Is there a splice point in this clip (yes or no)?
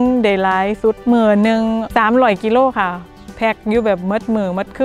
yes